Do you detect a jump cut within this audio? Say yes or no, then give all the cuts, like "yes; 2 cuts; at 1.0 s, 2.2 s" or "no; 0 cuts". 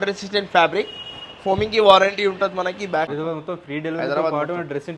yes; 1 cut; at 3.1 s